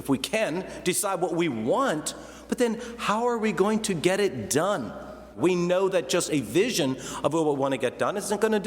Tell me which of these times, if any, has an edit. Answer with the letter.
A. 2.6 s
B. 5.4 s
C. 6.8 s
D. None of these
B